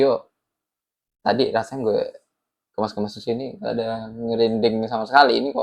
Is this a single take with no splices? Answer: yes; 0 cuts

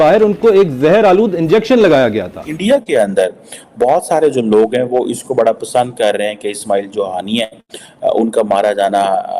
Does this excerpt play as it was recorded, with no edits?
no; 1 cut; at 2.5 s

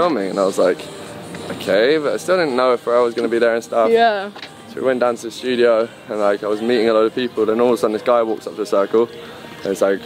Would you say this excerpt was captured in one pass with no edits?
yes; 0 cuts

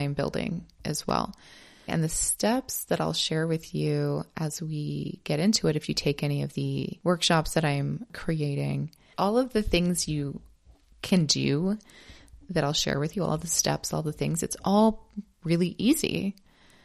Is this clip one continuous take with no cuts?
no; 4 cuts; at 1.9 s, 6.9 s, 8.1 s, 9.1 s

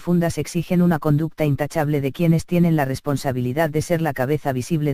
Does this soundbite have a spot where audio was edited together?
yes; 1 cut; at 2.3 s

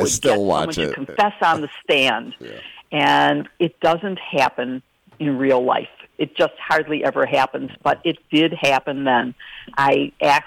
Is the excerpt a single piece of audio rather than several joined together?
yes; 0 cuts

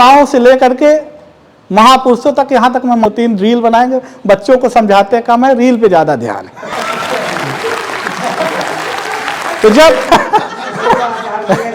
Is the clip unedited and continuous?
no; 2 cuts; at 3.0 s, 10.0 s

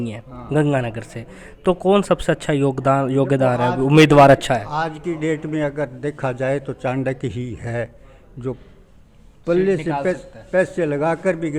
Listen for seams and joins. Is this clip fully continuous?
yes; 0 cuts

